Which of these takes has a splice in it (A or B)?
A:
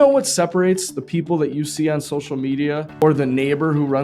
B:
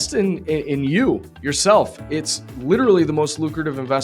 A